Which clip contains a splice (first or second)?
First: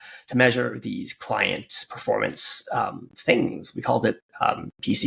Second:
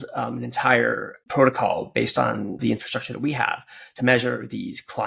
second